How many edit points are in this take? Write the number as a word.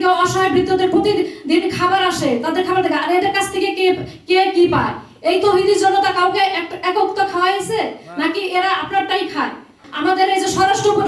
one